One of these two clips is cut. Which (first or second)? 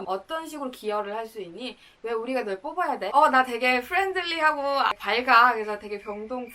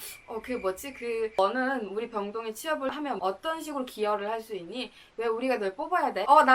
second